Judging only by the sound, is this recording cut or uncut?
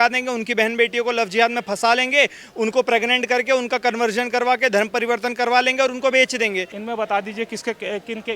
cut